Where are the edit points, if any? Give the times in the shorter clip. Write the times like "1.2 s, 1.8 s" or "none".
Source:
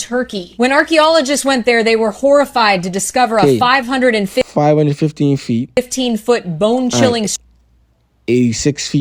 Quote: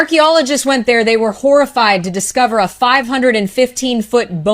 3.6 s